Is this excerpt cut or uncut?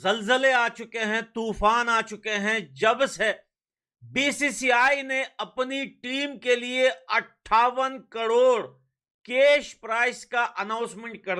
uncut